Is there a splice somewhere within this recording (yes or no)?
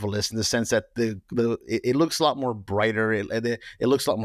no